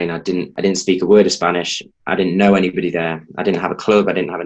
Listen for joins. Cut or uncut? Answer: uncut